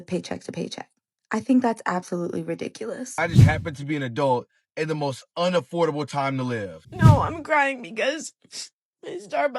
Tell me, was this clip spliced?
yes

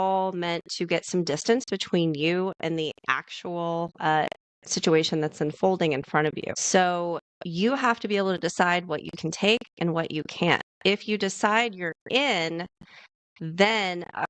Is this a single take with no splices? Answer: no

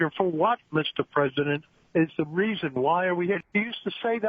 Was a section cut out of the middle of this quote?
yes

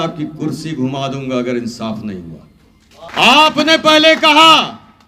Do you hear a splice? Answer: yes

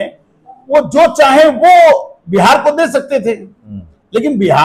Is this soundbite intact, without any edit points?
yes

